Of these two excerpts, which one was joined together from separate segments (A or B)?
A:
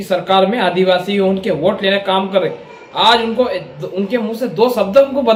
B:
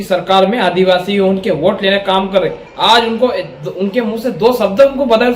B